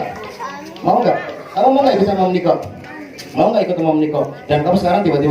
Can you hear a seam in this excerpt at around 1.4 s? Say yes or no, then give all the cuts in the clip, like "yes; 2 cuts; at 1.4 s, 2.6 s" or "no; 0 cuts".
yes; 1 cut; at 1.4 s